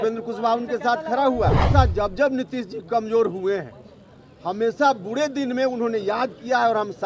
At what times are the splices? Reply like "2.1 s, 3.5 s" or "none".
1.7 s

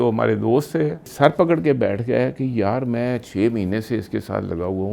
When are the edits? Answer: 1.1 s

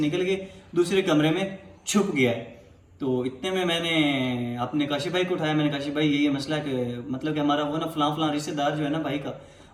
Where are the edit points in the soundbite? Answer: none

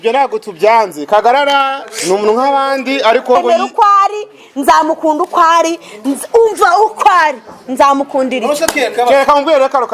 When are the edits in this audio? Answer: 3.4 s

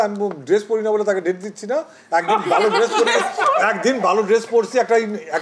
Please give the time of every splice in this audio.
none

